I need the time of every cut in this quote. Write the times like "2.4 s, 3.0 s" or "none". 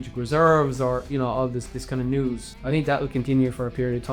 2.5 s